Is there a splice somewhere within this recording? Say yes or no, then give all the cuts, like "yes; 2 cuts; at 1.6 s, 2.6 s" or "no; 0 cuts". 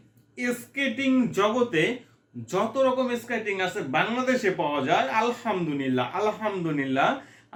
no; 0 cuts